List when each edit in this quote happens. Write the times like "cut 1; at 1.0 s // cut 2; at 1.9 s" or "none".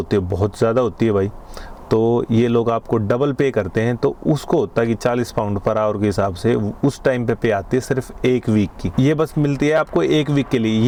none